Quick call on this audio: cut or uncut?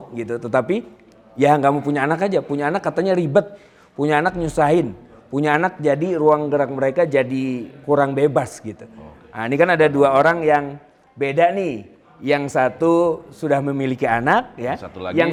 uncut